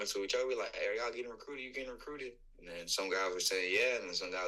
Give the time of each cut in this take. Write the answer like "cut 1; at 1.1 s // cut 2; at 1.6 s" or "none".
none